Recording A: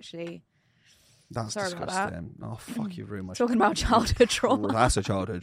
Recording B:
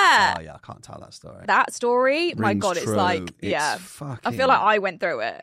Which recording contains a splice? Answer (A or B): B